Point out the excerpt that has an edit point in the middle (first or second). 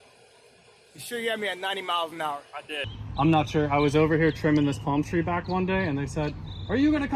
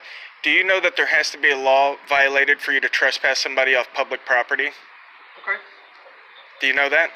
first